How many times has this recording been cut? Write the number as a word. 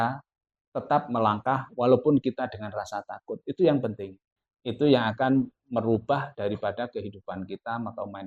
one